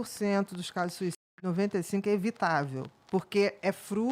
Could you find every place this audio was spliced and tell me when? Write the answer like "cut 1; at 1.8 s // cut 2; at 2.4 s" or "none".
none